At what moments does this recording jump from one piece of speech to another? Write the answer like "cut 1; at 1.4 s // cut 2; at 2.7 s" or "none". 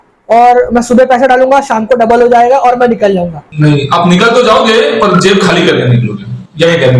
none